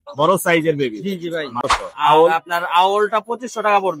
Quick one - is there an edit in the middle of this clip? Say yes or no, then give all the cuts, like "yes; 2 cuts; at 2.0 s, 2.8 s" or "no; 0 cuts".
yes; 1 cut; at 1.7 s